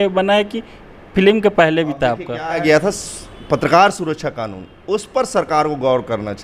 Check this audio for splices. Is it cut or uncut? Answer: cut